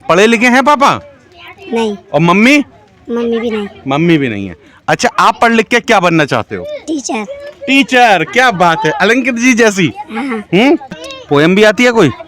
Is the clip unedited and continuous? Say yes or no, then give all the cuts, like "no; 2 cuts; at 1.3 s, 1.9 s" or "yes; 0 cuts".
no; 1 cut; at 11.1 s